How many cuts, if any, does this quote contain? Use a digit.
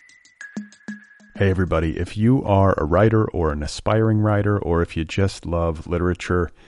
1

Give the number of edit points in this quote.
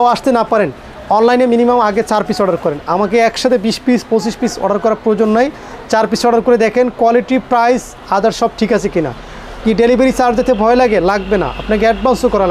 0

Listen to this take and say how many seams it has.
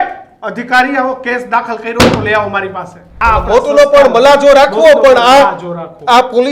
1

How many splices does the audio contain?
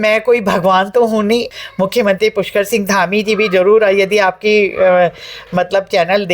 1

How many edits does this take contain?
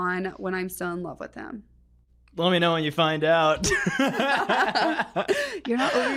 0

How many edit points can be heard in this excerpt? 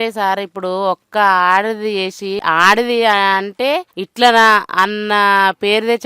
2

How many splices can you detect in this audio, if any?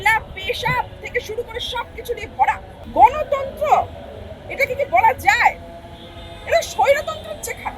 1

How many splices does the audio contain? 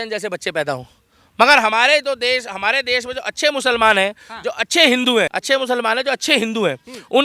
1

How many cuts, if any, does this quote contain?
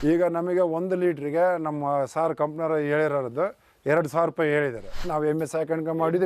1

